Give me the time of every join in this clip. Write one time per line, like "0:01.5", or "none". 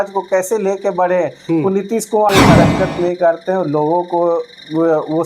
0:02.3